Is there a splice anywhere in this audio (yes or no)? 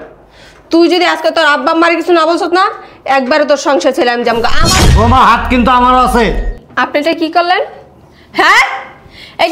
yes